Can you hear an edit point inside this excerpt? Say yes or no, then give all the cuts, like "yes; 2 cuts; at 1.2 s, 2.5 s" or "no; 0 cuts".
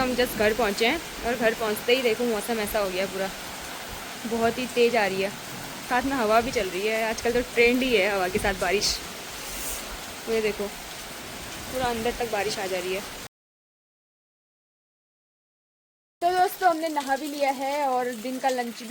no; 0 cuts